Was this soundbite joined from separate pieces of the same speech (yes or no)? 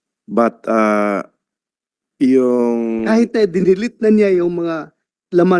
no